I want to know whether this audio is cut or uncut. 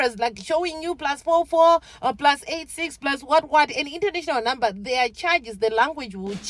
uncut